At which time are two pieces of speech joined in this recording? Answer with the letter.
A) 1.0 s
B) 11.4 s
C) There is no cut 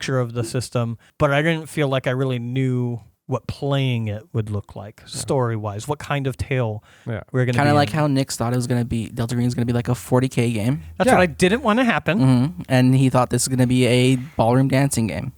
A